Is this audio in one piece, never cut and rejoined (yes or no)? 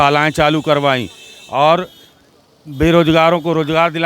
yes